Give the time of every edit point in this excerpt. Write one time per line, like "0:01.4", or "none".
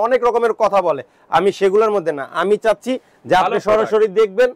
none